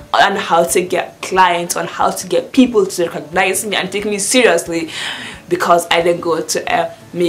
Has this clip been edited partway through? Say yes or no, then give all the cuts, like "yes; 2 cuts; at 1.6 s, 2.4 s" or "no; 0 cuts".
no; 0 cuts